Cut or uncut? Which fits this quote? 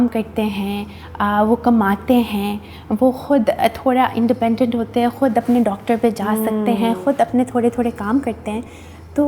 uncut